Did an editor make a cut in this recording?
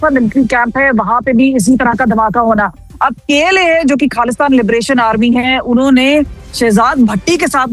no; 0 cuts

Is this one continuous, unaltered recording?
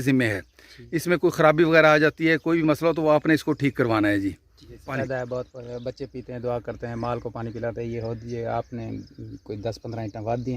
no; 1 cut; at 4.9 s

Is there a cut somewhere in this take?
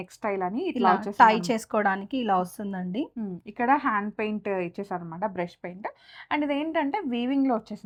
no; 0 cuts

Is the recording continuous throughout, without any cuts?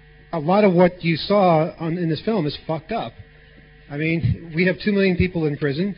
no; 1 cut; at 4.5 s

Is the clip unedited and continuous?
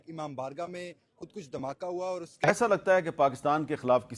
no; 1 cut; at 2.3 s

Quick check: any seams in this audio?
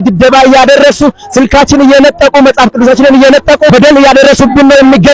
yes; 1 cut; at 3.7 s

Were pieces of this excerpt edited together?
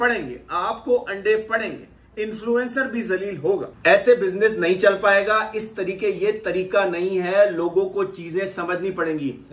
yes; 1 cut; at 3.7 s

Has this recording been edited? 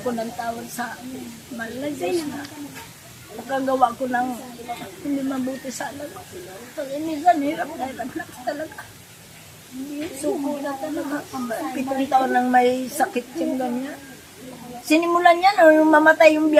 no; 0 cuts

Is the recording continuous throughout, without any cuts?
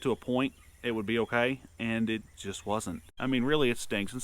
no; 1 cut; at 3.1 s

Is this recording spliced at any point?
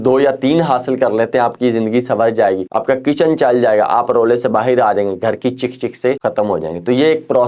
yes; 2 cuts; at 2.7 s, 6.2 s

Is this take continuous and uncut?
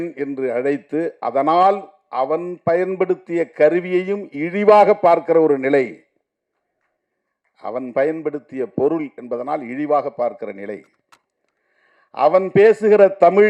yes; 0 cuts

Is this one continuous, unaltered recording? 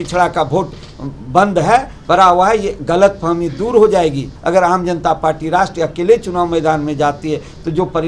no; 1 cut; at 4.3 s

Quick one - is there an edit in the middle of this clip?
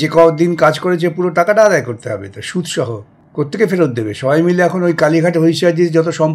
yes; 1 cut; at 3.2 s

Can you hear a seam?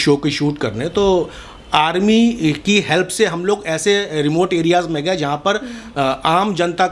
no; 0 cuts

